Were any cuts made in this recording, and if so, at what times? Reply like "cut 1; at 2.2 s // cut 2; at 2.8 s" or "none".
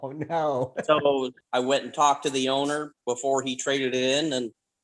cut 1; at 1.4 s